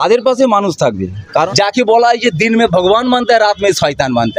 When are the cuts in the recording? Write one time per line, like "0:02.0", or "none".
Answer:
none